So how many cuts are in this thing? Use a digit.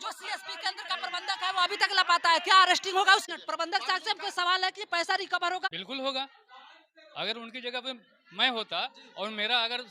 1